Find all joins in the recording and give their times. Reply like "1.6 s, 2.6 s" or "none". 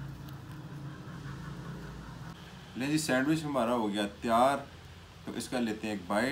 2.4 s